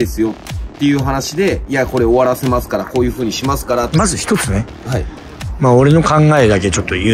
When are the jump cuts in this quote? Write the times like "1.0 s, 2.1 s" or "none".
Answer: 3.9 s

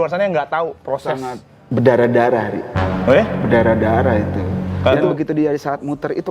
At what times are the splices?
1.6 s, 5.0 s

